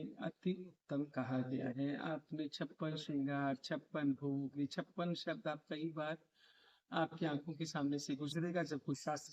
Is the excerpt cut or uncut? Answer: uncut